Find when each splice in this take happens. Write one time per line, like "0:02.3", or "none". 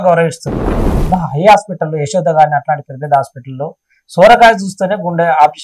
0:00.9